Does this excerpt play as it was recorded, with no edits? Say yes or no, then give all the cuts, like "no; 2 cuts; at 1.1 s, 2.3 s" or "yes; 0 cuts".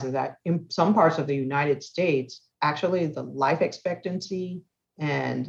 no; 1 cut; at 2.4 s